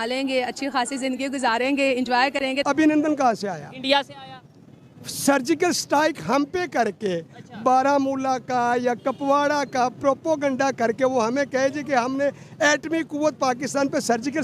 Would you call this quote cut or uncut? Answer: cut